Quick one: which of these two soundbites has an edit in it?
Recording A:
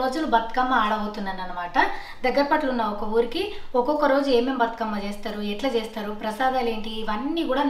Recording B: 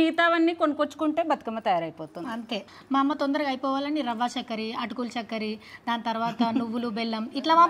B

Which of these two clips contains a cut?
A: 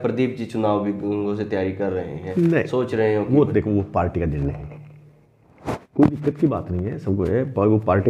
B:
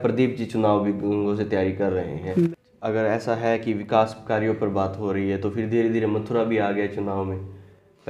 B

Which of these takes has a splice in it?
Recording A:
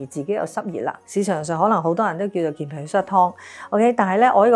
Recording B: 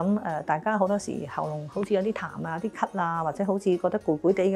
A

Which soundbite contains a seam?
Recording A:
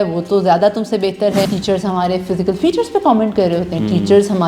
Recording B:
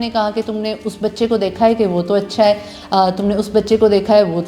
A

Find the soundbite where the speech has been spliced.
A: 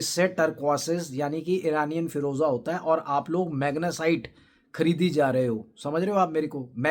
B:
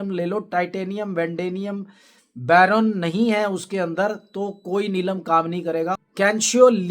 B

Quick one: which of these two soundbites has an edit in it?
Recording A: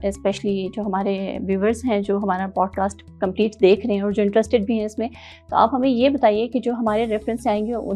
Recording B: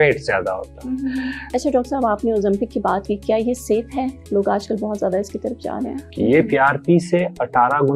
B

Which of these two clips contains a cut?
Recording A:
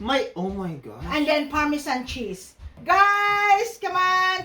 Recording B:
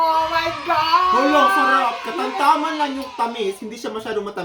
A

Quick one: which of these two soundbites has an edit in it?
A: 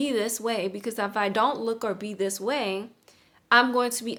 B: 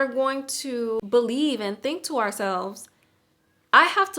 B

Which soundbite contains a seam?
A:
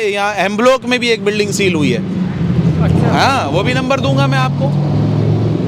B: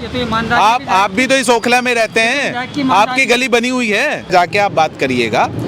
B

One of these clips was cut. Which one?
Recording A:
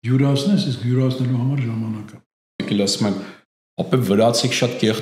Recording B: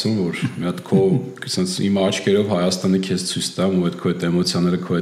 A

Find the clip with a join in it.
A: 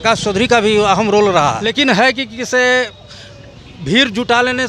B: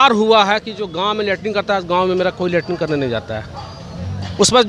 A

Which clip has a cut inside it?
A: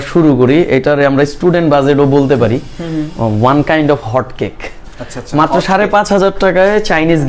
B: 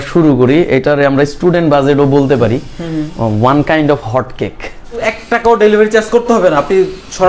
B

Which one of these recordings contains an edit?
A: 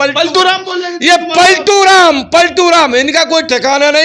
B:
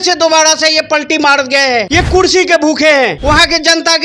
B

